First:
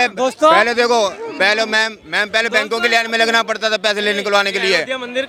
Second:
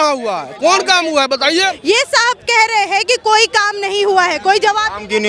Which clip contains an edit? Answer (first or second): second